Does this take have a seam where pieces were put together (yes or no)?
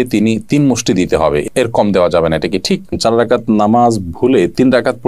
yes